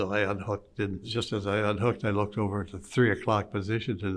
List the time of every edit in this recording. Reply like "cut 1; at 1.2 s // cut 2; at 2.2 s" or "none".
cut 1; at 1.1 s